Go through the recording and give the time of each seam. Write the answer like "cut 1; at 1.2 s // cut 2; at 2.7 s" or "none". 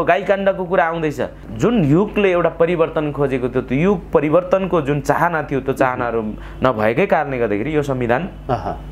cut 1; at 1.4 s